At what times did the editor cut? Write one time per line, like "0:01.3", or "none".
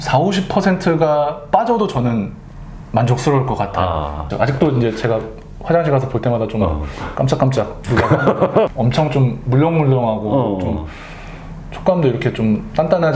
0:04.2
0:08.7